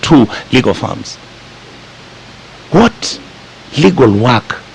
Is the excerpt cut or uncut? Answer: uncut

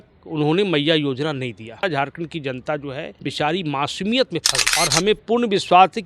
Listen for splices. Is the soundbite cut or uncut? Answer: cut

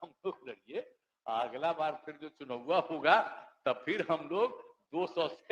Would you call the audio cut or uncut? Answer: uncut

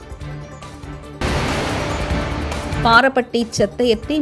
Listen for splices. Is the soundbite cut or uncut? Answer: uncut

